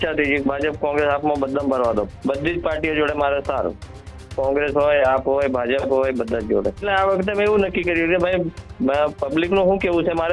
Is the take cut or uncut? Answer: cut